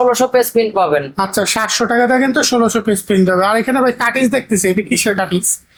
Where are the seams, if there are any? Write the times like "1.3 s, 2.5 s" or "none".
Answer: none